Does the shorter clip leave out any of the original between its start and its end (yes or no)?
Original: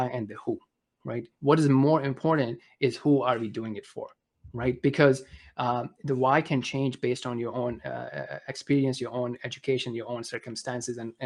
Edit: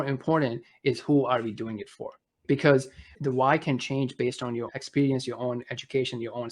yes